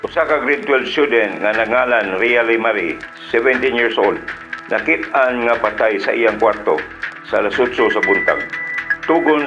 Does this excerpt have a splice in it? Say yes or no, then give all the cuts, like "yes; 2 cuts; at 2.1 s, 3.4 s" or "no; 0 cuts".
no; 0 cuts